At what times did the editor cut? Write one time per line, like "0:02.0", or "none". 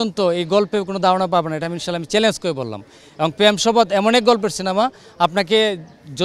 none